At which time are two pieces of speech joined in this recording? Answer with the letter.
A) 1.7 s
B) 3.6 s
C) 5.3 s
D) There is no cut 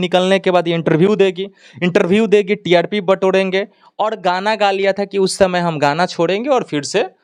D